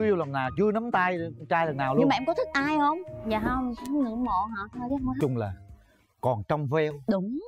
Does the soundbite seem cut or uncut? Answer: cut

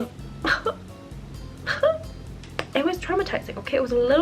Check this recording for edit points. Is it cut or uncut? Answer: cut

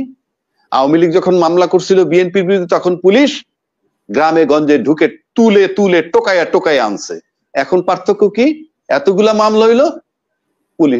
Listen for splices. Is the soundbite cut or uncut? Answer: uncut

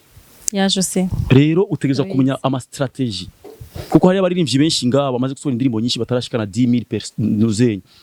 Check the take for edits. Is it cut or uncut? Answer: uncut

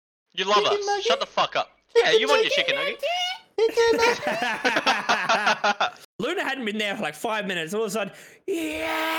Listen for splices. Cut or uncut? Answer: cut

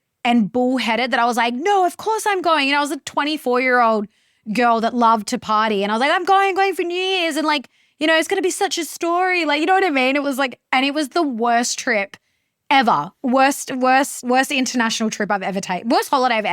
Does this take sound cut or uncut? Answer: cut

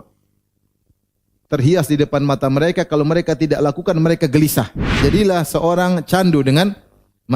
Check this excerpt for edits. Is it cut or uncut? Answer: cut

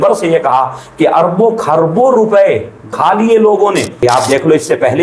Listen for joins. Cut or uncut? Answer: cut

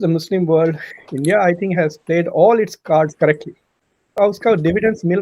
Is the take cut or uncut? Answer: uncut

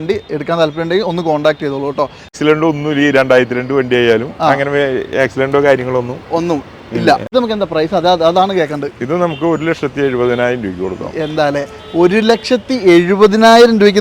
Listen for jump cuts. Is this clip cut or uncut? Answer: cut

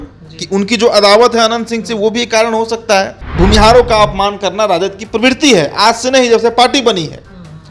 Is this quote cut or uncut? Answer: cut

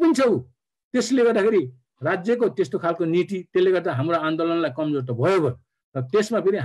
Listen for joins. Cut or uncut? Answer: uncut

